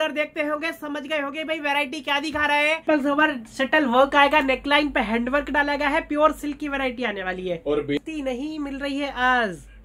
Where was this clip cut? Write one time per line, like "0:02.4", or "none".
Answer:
0:02.8
0:08.0